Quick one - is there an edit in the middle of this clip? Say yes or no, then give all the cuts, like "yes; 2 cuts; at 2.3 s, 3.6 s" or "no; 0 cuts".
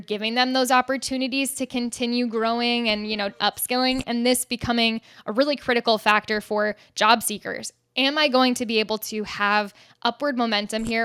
no; 0 cuts